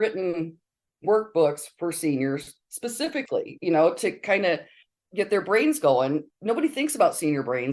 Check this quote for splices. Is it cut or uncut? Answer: cut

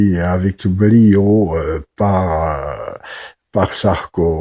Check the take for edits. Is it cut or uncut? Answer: cut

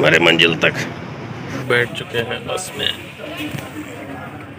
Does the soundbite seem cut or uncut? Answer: cut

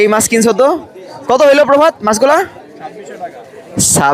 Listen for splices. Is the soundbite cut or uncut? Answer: uncut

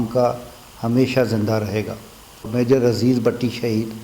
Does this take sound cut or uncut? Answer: cut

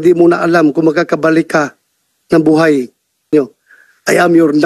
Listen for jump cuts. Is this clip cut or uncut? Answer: cut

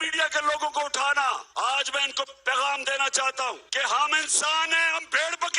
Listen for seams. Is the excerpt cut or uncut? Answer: cut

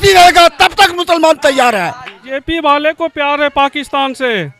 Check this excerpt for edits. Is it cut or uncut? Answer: cut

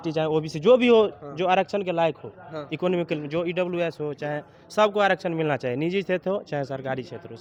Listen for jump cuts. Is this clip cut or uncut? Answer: uncut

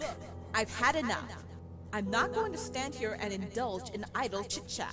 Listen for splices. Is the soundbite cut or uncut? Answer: uncut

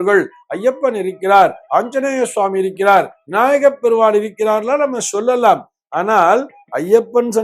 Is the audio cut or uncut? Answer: uncut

